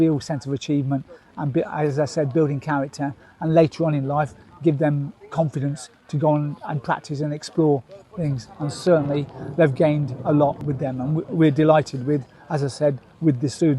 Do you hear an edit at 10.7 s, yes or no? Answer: yes